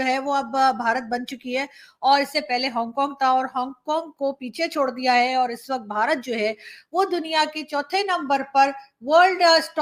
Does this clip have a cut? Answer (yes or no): no